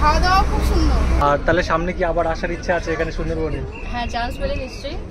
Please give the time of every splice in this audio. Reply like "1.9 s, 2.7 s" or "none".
1.2 s

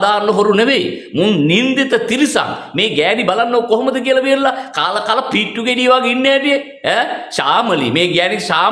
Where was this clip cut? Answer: none

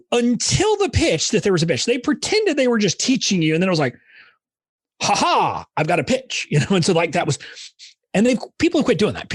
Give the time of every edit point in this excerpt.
none

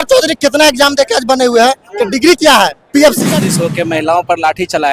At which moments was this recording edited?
3.2 s

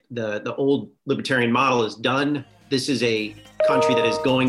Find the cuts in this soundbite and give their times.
0.9 s, 2.6 s

